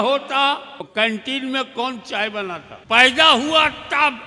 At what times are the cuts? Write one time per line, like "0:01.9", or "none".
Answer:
0:00.9
0:02.7